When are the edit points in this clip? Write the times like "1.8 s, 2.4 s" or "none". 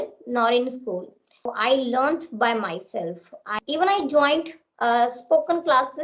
1.5 s, 3.5 s